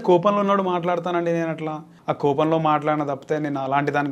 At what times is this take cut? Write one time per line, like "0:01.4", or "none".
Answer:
0:01.9